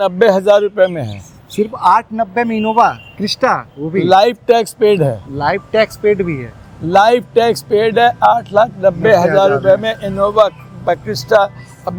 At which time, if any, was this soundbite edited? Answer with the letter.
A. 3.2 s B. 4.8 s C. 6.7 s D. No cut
D